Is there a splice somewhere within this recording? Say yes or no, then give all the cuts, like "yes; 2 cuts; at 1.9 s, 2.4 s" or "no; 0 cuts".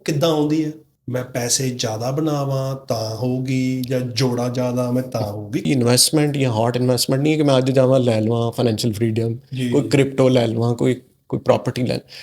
yes; 2 cuts; at 0.9 s, 5.6 s